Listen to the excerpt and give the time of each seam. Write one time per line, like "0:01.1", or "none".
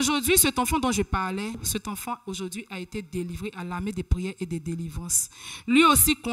0:01.6